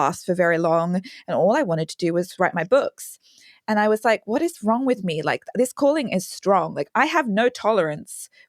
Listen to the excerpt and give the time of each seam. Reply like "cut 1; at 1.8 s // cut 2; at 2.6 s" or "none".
cut 1; at 2.3 s // cut 2; at 6.8 s